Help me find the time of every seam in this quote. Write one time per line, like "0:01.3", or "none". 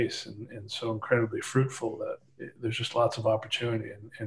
none